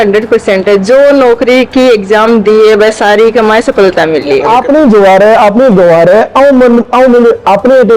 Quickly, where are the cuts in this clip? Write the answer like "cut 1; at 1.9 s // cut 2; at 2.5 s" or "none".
cut 1; at 4.5 s